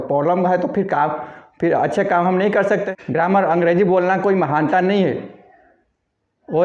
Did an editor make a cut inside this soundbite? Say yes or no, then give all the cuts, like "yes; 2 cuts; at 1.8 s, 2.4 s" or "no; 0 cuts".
yes; 1 cut; at 2.9 s